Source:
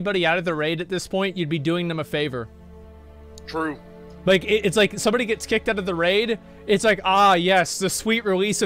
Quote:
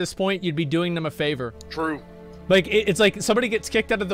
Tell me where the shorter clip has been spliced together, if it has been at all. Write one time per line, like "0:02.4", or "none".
0:01.6

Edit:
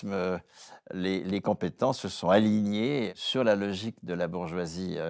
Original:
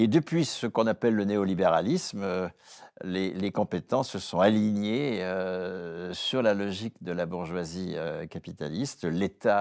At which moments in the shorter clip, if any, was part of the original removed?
0:03.1

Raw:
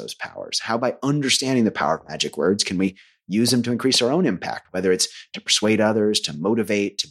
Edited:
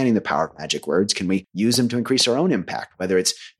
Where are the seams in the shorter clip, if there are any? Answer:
0:01.5

